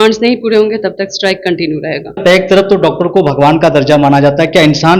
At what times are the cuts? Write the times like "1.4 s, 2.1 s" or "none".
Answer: none